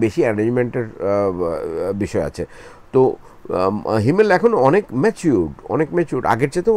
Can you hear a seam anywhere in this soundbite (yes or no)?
no